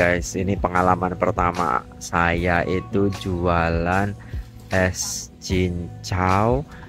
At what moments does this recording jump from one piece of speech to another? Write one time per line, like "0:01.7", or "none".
none